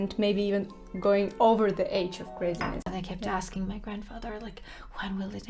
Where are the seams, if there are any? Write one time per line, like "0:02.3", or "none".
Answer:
0:02.9